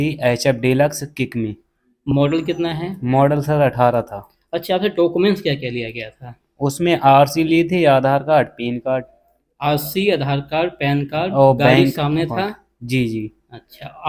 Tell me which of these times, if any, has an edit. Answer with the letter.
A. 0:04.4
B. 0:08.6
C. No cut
C